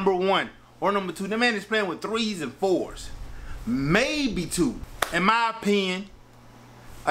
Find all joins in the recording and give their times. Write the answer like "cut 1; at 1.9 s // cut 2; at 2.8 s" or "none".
cut 1; at 4.9 s